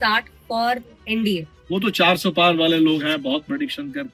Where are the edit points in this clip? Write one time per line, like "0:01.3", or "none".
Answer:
0:01.5